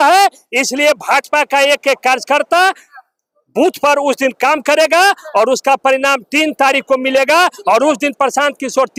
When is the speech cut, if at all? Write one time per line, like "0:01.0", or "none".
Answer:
none